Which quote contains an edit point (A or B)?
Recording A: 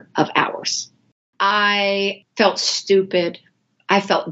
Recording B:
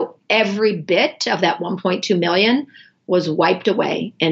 A